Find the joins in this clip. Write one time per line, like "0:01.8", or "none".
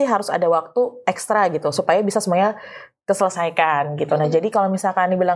none